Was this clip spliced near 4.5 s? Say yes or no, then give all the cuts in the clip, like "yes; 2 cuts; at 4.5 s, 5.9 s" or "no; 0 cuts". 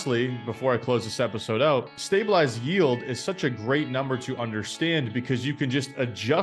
no; 1 cut; at 2.0 s